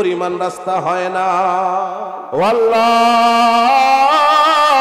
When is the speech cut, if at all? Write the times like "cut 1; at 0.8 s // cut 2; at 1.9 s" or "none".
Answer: cut 1; at 2.1 s